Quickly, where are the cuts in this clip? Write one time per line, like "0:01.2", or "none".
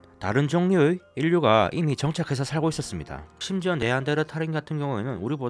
0:03.4